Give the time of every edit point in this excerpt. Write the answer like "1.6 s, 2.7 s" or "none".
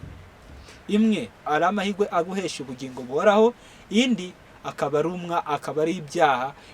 1.4 s